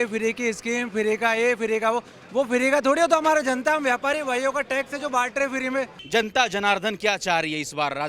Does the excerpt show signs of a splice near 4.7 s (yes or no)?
no